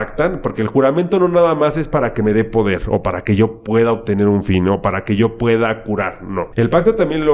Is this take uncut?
no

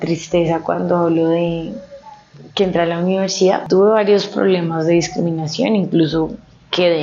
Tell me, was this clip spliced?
yes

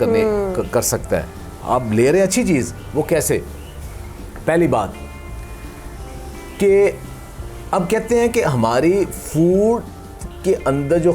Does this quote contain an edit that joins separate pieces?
no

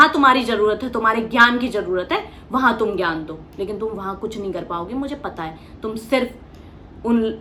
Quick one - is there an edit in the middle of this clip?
no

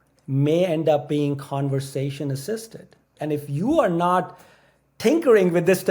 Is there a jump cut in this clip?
yes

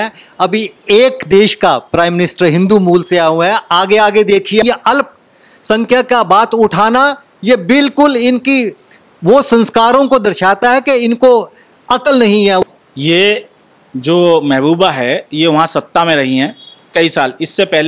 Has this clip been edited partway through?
yes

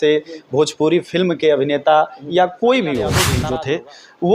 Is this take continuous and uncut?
no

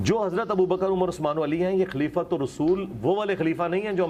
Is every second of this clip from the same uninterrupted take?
yes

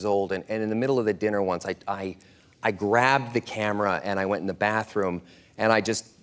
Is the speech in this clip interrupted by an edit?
no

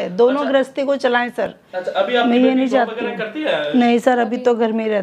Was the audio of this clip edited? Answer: no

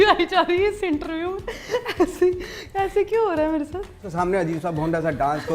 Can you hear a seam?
yes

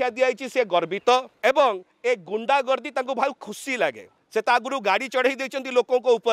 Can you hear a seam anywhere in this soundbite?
yes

